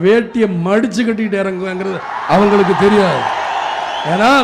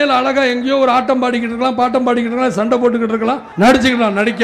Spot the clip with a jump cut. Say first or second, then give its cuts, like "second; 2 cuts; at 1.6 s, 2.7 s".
second; 1 cut; at 3.4 s